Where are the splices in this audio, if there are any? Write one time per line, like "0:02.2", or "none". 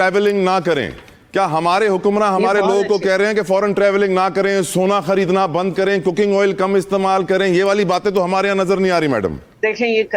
none